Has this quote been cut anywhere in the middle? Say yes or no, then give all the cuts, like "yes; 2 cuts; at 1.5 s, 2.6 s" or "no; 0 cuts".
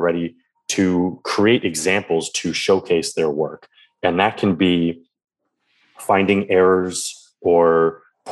no; 0 cuts